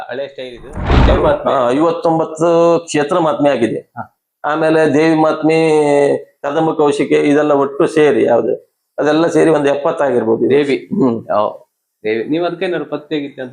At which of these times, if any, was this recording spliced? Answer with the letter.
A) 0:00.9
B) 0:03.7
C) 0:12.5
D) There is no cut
A